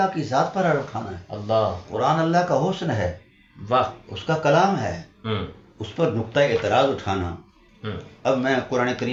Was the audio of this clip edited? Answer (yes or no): no